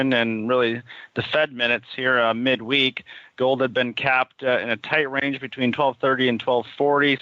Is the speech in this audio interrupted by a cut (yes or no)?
yes